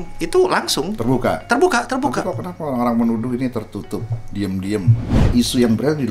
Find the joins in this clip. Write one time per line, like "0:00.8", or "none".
0:05.1